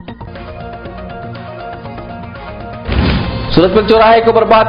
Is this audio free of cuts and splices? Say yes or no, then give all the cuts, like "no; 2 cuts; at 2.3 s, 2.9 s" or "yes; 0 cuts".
no; 1 cut; at 2.9 s